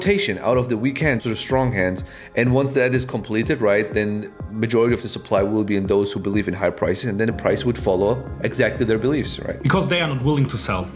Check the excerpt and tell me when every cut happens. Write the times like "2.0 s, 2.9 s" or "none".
1.2 s